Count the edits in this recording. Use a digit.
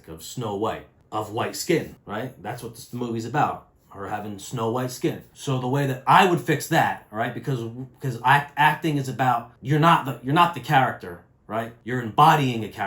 5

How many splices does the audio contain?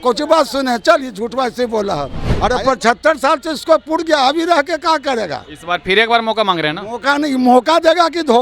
1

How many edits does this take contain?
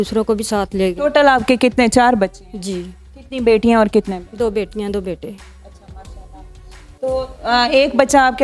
0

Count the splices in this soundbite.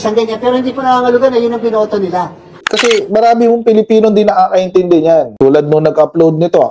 2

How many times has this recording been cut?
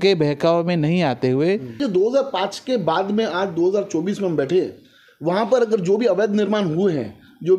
1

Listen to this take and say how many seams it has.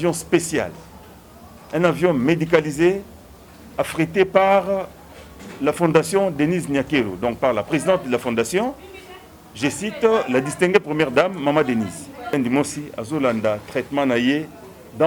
1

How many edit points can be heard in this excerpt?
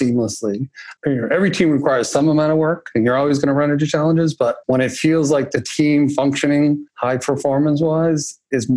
4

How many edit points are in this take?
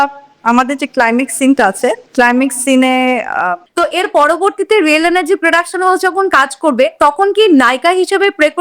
1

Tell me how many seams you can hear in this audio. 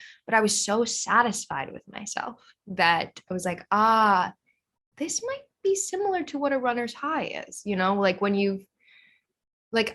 0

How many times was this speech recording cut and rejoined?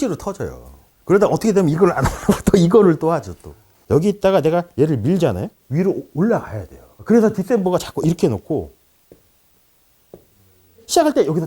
1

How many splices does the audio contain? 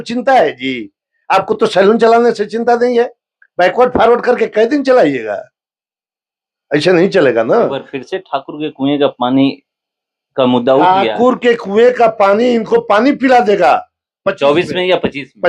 0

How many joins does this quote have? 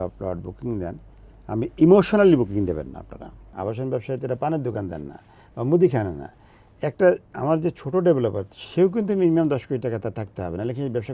1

